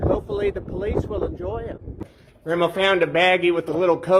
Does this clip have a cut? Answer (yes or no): no